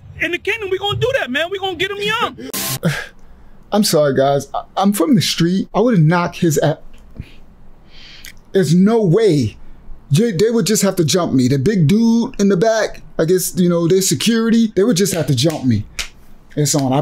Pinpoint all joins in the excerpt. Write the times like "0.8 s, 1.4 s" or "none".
2.4 s, 5.7 s, 14.7 s